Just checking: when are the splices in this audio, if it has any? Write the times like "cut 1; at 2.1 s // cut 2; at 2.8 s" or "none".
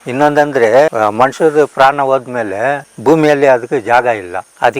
cut 1; at 0.9 s